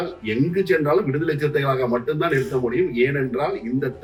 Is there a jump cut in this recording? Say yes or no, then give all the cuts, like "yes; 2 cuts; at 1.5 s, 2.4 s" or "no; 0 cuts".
no; 0 cuts